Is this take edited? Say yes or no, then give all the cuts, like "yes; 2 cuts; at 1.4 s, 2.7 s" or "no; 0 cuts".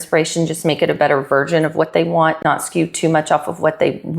yes; 1 cut; at 2.4 s